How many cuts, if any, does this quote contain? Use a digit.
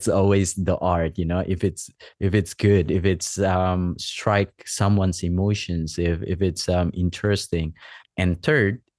1